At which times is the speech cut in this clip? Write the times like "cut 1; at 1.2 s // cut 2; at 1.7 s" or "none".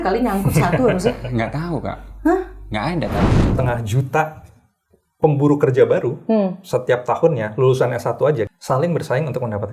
cut 1; at 3.5 s // cut 2; at 8.5 s